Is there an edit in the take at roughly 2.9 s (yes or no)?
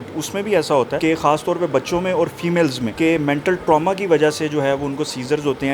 yes